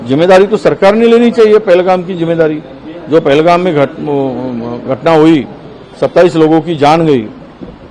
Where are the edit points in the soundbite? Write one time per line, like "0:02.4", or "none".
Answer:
none